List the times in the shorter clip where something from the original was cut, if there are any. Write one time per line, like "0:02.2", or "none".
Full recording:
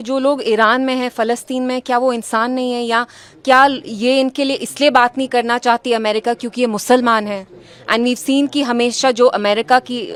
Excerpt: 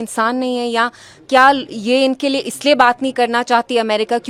none